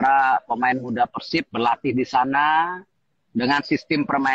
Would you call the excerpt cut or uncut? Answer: uncut